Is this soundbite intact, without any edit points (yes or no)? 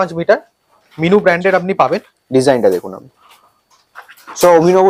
yes